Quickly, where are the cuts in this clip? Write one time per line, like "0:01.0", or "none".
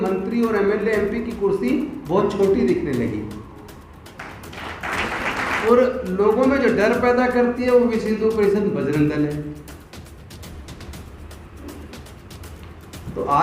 0:05.7